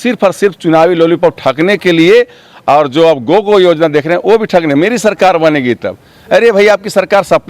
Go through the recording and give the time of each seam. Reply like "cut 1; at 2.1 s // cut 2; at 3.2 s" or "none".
none